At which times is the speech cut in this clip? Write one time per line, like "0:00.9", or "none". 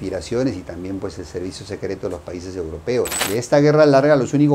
0:03.2

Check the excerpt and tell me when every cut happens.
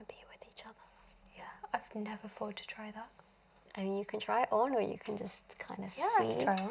none

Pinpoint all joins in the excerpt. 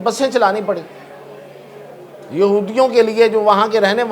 none

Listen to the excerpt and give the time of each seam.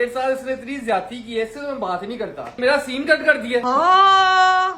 0:02.5
0:03.6

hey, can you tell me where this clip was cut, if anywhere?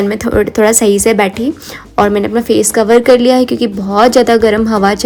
none

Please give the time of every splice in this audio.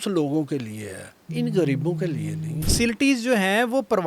0:01.2
0:02.6

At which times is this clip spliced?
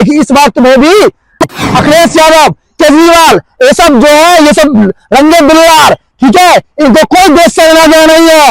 0:01.4

